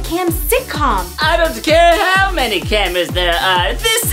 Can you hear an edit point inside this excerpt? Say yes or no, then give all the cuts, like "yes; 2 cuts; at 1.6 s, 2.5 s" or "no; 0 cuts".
no; 0 cuts